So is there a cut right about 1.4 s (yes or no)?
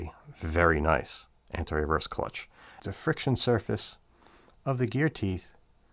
no